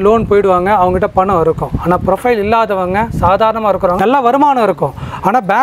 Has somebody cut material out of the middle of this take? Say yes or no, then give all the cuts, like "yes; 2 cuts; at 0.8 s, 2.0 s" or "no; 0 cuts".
no; 0 cuts